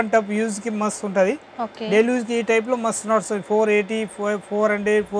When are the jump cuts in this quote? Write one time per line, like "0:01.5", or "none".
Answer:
none